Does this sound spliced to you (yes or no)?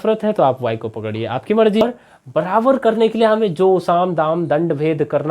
yes